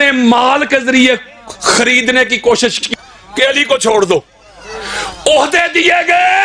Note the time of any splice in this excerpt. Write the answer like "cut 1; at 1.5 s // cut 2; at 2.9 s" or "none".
cut 1; at 2.9 s